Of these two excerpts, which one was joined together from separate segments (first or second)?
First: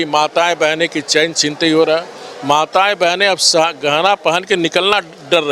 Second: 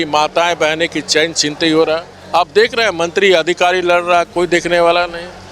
second